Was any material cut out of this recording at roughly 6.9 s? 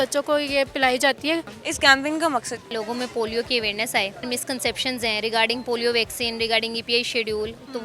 no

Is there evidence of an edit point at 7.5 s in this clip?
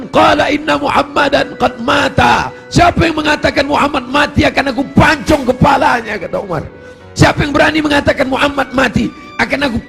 no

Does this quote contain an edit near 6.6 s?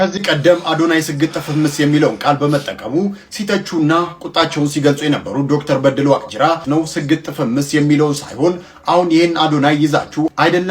yes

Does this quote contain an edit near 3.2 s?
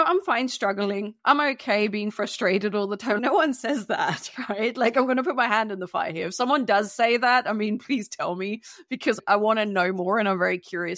yes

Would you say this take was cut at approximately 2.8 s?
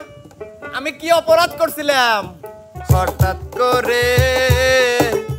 yes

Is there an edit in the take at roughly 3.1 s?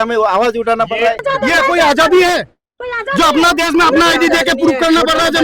no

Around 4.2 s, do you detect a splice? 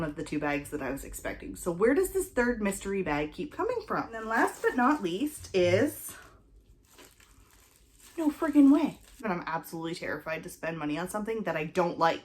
yes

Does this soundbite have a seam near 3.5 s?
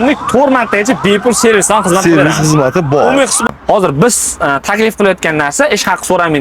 yes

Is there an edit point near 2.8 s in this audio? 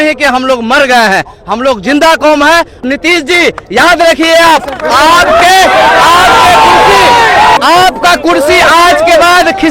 yes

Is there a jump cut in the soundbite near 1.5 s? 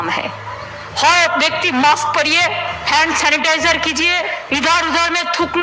no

